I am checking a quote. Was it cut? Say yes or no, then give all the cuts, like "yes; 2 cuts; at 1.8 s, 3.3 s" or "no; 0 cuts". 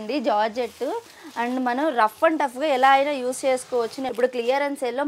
yes; 1 cut; at 4.1 s